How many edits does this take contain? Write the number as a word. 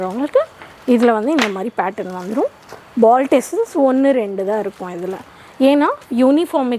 zero